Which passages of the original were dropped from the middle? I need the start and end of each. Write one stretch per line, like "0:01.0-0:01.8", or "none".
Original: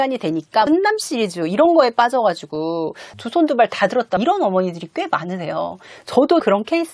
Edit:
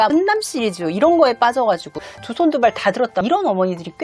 0:02.5-0:02.9